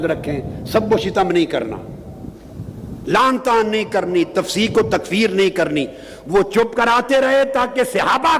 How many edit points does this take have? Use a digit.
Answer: 0